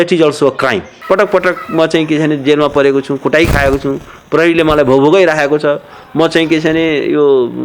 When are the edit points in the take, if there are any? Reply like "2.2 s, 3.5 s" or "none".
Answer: 0.9 s